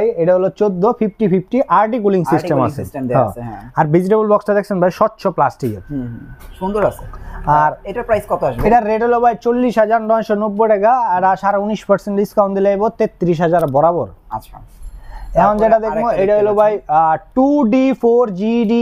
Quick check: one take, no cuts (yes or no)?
yes